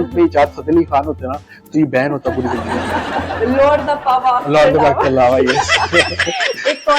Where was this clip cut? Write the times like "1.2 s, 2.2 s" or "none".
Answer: 3.3 s, 6.1 s